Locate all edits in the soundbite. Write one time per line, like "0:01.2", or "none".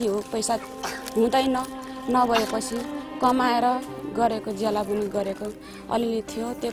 none